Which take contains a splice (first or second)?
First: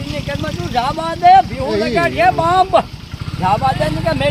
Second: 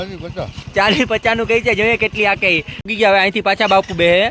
second